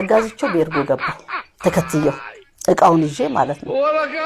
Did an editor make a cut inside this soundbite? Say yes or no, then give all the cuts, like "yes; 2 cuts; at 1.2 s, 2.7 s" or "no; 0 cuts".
no; 0 cuts